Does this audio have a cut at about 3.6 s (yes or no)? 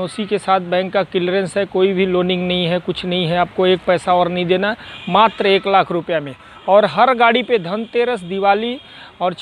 no